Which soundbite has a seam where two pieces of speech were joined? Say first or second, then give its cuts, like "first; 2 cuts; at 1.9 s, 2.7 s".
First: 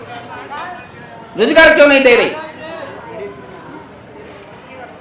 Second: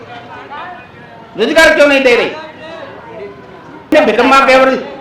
second; 1 cut; at 3.9 s